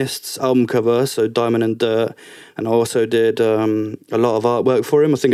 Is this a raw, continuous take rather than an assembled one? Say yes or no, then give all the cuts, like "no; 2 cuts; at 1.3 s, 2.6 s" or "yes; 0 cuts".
yes; 0 cuts